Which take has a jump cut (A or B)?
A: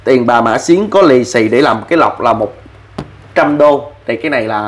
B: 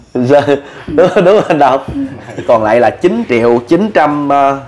B